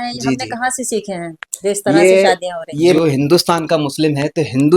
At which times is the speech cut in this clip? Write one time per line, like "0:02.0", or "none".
0:02.9